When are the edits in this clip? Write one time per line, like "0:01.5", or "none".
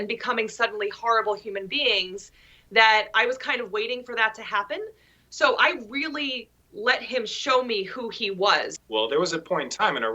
0:08.7